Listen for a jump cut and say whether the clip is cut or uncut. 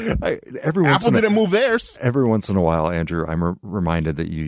uncut